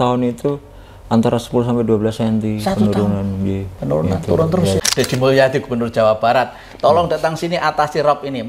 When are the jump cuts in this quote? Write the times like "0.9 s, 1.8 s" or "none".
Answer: 4.8 s